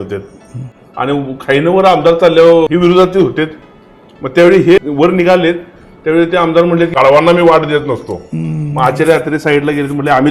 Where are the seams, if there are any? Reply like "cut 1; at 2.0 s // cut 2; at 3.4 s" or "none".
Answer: cut 1; at 2.7 s // cut 2; at 4.8 s // cut 3; at 6.9 s